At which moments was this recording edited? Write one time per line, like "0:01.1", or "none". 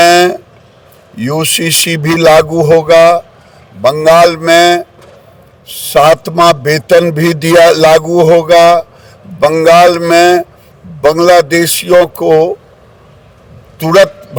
none